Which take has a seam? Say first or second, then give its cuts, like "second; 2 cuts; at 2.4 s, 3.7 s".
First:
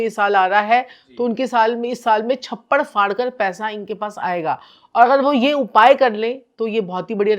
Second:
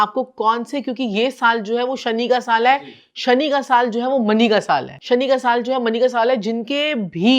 second; 1 cut; at 4.9 s